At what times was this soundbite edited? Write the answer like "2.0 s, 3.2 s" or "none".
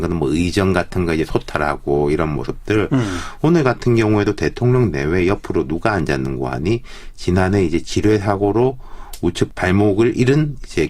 6.5 s